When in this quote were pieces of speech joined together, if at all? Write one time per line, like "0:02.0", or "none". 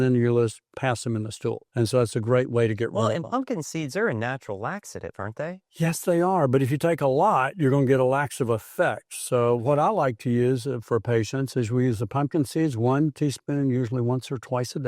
0:01.6